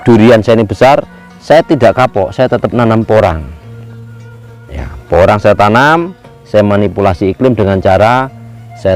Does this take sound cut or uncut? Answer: uncut